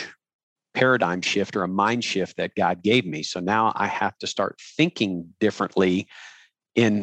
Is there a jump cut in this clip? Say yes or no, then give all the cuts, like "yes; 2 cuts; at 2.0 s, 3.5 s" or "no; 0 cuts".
no; 0 cuts